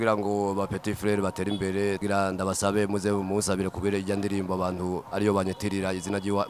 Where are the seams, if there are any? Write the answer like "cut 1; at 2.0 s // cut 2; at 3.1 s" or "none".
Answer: cut 1; at 2.0 s